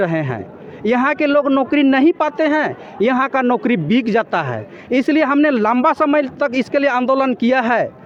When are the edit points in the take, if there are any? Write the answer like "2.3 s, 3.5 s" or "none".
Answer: none